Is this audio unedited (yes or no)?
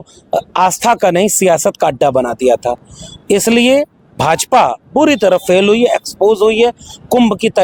yes